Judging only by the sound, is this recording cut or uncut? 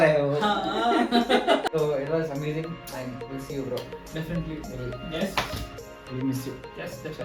uncut